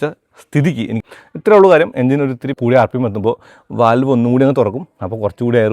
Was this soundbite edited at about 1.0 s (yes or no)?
yes